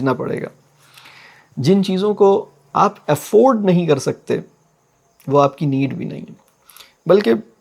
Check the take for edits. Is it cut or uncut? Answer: uncut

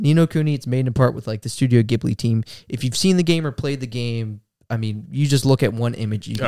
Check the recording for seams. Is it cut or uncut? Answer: uncut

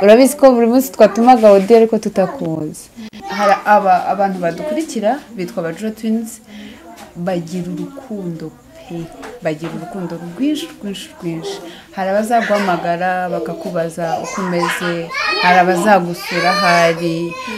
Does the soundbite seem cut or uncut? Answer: cut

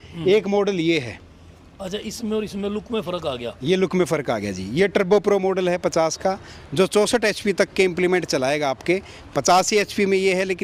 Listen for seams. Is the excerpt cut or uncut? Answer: uncut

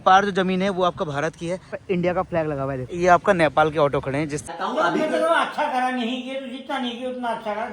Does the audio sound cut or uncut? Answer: cut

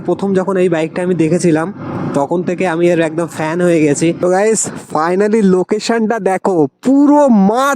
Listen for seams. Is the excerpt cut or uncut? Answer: cut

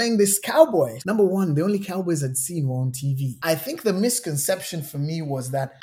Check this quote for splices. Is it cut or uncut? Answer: cut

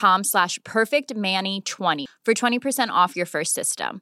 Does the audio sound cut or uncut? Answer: cut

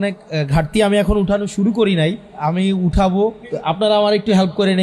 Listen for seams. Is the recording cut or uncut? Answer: cut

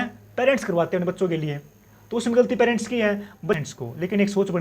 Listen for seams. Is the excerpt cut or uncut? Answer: cut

